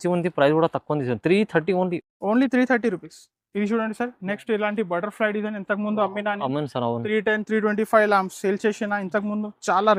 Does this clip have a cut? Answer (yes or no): no